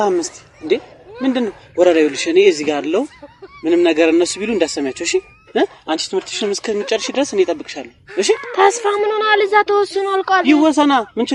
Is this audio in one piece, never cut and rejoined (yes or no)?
yes